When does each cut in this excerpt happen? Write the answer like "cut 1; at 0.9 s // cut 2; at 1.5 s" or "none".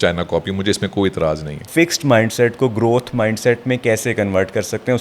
cut 1; at 1.6 s